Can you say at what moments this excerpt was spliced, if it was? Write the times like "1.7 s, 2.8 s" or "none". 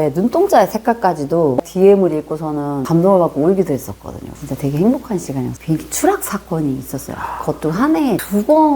1.6 s, 5.6 s